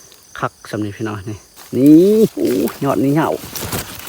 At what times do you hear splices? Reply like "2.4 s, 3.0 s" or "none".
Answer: 1.5 s, 2.3 s